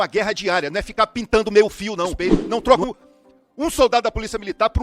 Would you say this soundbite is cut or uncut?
cut